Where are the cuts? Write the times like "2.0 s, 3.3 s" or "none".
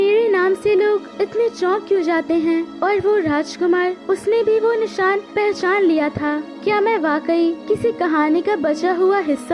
1.1 s, 2.7 s, 4.0 s, 5.3 s, 6.5 s, 7.6 s